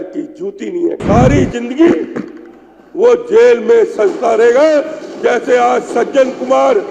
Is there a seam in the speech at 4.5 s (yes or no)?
no